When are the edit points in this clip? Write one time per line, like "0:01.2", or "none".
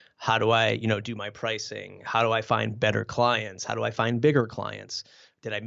none